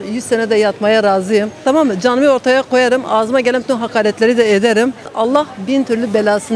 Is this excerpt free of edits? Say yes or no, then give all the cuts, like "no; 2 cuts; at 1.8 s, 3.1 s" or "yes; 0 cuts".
no; 2 cuts; at 1.6 s, 5.0 s